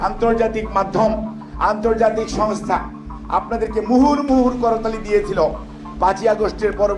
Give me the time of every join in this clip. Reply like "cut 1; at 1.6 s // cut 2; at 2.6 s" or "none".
none